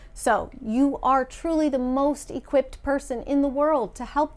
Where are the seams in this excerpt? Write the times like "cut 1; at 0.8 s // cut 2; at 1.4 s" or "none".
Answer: none